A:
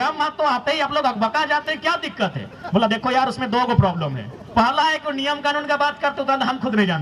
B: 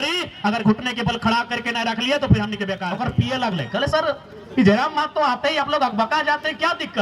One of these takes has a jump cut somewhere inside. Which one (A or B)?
B